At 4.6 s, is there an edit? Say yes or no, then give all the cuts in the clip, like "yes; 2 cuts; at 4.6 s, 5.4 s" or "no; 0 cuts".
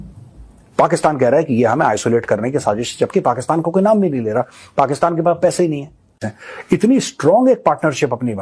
no; 1 cut; at 6.1 s